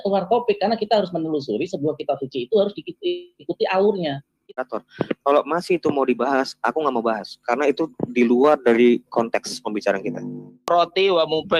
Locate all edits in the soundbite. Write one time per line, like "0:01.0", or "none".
0:04.4
0:10.7